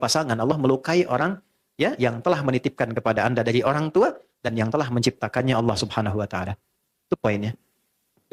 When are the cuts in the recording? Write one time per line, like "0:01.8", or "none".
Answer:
none